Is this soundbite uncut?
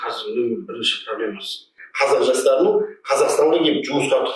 no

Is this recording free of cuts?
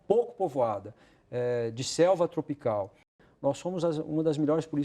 no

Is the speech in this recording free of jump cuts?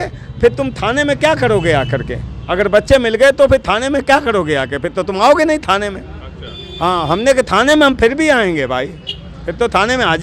yes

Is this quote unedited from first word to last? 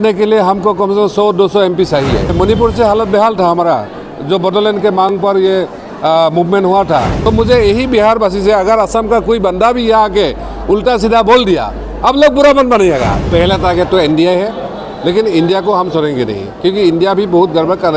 no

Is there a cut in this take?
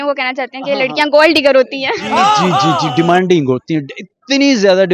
no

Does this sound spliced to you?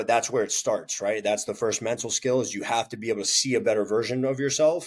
no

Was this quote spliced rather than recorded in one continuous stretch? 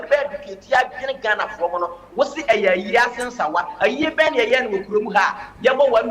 no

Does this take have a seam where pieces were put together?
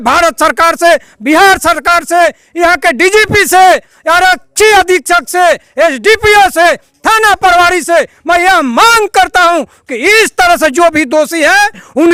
no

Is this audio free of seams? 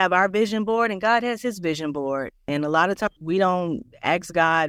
yes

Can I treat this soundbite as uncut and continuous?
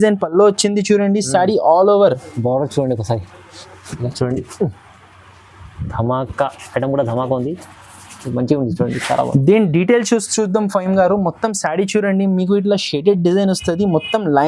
yes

